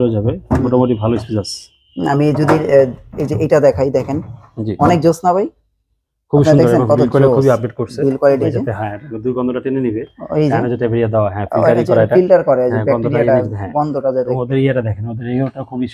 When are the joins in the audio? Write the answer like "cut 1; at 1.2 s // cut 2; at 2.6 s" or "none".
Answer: cut 1; at 8.4 s